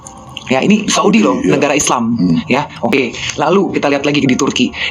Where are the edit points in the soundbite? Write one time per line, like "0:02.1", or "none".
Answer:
none